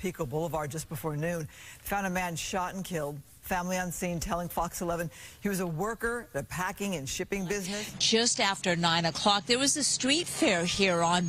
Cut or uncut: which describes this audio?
cut